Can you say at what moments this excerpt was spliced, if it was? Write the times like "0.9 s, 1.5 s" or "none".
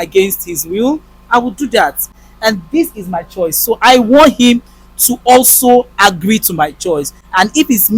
2.1 s